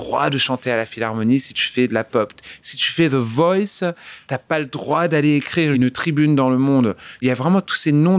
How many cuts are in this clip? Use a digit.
2